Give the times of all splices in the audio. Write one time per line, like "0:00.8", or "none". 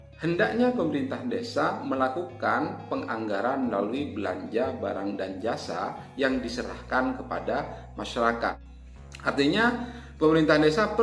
0:08.7